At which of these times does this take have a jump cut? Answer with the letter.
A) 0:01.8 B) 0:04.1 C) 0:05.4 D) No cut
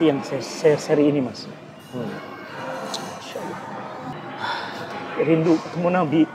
B